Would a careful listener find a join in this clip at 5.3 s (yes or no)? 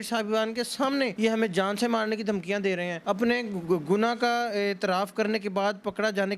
no